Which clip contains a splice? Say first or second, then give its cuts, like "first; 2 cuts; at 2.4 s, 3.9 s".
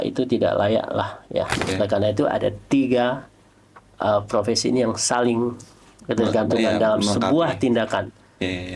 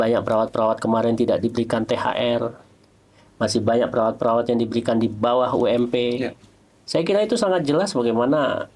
first; 1 cut; at 1.6 s